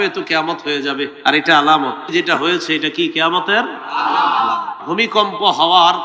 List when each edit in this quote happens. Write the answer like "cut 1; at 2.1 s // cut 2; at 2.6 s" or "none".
cut 1; at 1.1 s // cut 2; at 2.0 s // cut 3; at 4.8 s